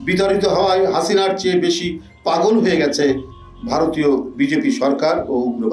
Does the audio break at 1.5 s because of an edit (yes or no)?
no